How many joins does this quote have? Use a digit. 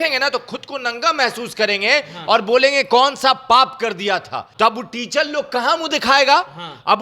1